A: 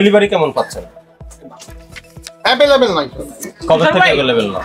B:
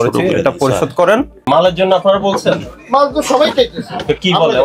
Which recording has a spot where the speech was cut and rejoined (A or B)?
B